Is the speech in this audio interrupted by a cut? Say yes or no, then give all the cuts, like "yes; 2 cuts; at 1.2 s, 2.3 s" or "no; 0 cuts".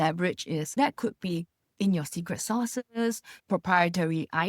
yes; 2 cuts; at 0.8 s, 3.4 s